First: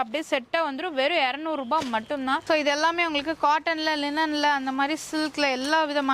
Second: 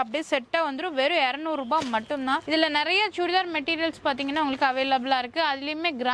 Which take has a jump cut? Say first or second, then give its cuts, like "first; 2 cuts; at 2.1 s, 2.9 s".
first; 1 cut; at 2.4 s